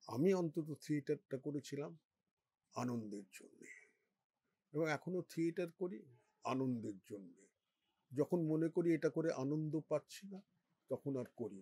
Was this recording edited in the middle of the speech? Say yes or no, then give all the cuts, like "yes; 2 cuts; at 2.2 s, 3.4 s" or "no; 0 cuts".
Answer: no; 0 cuts